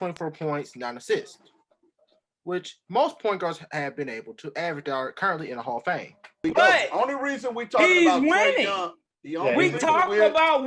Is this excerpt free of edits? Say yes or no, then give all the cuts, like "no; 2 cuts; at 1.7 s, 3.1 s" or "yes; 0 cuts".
no; 1 cut; at 6.4 s